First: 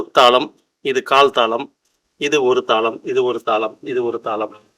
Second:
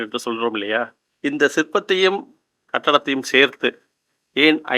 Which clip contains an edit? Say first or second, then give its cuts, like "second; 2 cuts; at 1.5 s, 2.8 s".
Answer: second; 1 cut; at 1.0 s